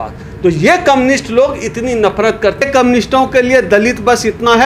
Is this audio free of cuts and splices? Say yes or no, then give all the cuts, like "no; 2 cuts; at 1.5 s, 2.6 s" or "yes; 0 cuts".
no; 1 cut; at 2.6 s